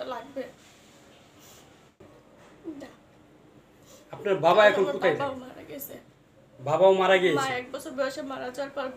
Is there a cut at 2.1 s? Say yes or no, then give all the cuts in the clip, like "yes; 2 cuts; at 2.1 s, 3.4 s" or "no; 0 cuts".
yes; 1 cut; at 2.1 s